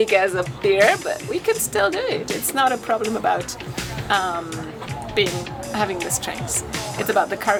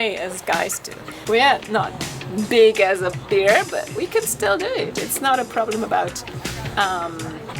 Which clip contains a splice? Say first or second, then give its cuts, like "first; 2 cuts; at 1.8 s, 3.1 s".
second; 1 cut; at 1.1 s